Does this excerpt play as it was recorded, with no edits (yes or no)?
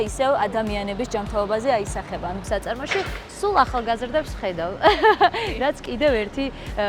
no